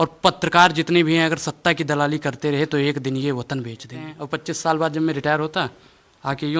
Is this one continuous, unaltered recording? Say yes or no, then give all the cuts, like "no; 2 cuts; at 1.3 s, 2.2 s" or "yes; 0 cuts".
no; 1 cut; at 4.2 s